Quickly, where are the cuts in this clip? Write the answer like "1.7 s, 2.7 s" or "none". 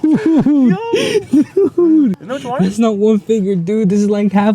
2.3 s